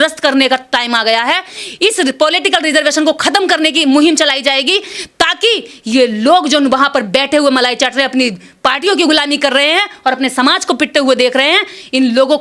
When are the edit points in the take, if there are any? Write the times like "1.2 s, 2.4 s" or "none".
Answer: none